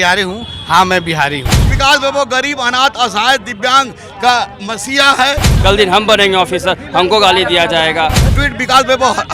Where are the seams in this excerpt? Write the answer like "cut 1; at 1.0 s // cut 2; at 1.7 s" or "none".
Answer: cut 1; at 1.7 s // cut 2; at 5.5 s // cut 3; at 8.3 s

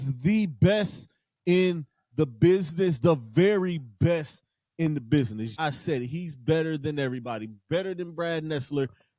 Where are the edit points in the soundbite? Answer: cut 1; at 5.5 s

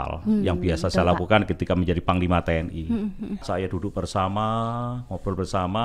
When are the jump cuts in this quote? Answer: cut 1; at 3.4 s

